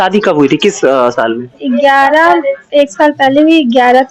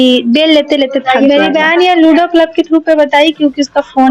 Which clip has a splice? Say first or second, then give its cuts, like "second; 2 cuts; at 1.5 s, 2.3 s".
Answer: second; 1 cut; at 1.0 s